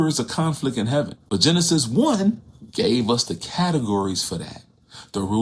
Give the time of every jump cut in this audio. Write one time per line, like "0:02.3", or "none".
0:01.2